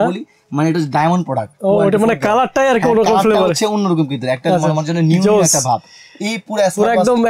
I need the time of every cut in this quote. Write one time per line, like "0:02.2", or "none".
none